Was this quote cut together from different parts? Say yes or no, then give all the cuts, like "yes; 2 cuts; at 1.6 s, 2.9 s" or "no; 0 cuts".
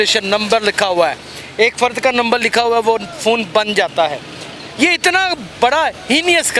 no; 0 cuts